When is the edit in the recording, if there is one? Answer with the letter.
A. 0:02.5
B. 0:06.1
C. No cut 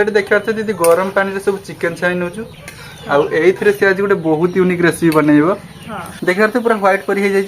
B